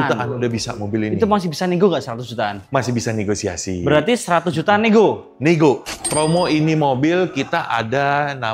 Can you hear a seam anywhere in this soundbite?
yes; 1 cut; at 6.0 s

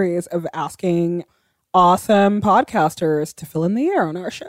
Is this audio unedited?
no; 2 cuts; at 1.3 s, 3.3 s

